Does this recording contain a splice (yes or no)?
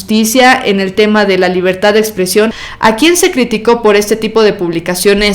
yes